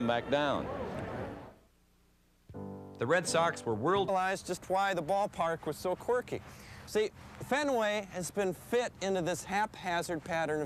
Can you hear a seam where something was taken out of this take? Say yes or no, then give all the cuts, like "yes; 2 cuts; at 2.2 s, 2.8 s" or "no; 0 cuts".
no; 0 cuts